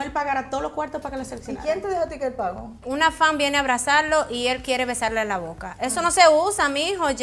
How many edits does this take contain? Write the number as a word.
one